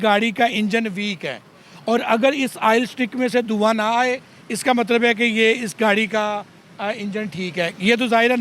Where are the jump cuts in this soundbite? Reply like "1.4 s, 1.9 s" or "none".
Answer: none